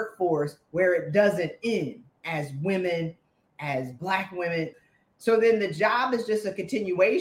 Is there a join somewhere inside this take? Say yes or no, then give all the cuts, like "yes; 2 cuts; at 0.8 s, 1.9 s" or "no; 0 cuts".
yes; 1 cut; at 4.7 s